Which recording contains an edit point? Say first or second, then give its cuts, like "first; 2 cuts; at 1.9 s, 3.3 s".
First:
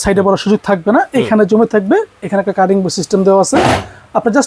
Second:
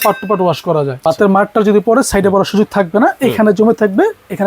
second; 1 cut; at 1.0 s